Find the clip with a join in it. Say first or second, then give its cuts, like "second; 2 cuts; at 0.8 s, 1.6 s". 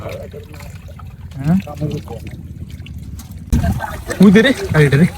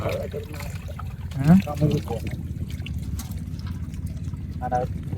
first; 1 cut; at 3.5 s